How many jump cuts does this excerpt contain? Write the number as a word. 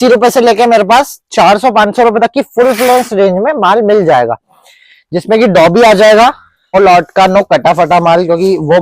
one